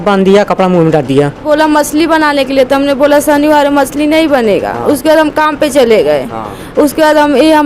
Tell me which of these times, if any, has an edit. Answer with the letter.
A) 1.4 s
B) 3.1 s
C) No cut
A